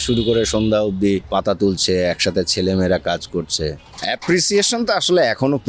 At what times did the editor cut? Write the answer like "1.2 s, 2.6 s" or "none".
1.2 s, 3.9 s